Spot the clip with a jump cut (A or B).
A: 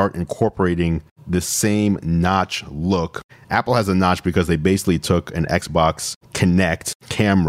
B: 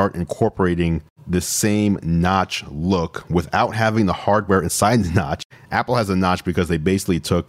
A